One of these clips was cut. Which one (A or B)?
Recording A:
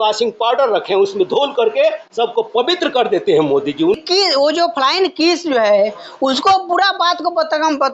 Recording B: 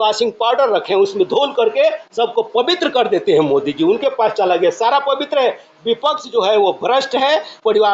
A